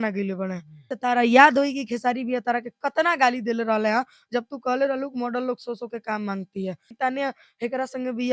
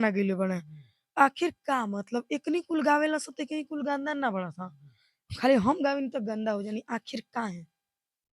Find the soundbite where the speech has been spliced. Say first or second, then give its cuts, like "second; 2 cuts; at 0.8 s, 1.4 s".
first; 2 cuts; at 0.9 s, 6.9 s